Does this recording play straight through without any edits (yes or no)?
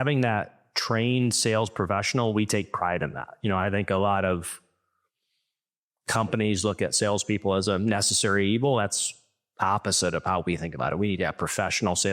yes